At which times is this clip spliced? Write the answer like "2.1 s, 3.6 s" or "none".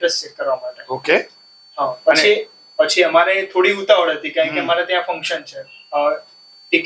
none